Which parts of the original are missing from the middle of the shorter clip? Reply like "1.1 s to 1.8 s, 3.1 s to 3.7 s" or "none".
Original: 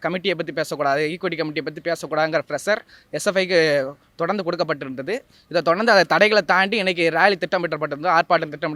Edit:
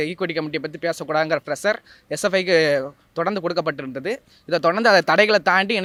none